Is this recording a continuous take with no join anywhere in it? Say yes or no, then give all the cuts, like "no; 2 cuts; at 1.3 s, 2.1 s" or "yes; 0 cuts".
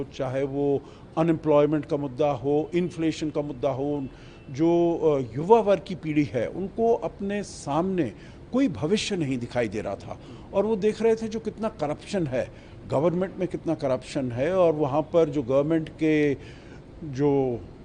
yes; 0 cuts